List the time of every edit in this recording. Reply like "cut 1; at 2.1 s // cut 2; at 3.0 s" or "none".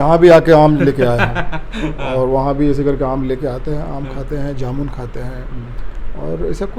none